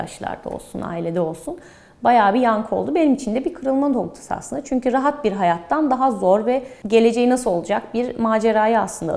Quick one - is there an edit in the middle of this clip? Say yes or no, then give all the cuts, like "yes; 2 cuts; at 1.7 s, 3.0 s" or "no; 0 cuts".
yes; 1 cut; at 6.7 s